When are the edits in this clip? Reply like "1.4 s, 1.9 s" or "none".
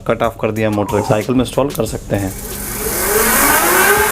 1.1 s